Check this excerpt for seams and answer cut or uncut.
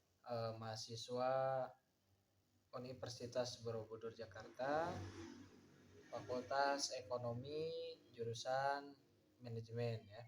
uncut